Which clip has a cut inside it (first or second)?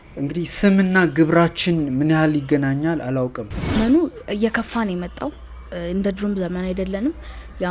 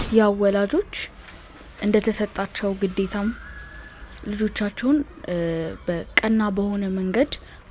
first